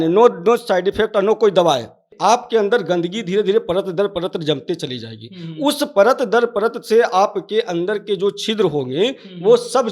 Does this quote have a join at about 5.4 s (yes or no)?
no